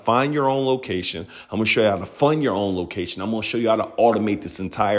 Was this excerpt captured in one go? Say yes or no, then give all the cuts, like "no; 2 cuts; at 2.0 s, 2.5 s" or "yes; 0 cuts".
yes; 0 cuts